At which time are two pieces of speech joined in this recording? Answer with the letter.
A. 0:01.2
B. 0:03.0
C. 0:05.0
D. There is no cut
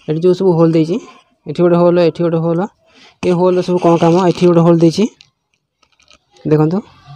D